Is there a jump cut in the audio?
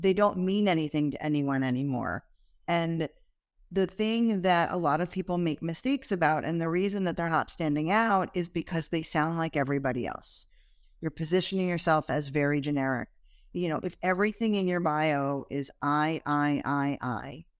no; 0 cuts

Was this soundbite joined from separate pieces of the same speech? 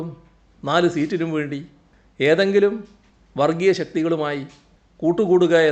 no; 0 cuts

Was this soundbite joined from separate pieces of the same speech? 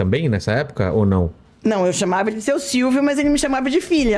no; 0 cuts

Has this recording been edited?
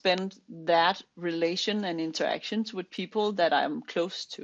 no; 0 cuts

